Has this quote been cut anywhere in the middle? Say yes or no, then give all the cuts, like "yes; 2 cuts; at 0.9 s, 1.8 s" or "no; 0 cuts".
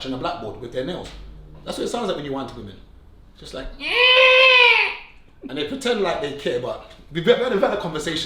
no; 0 cuts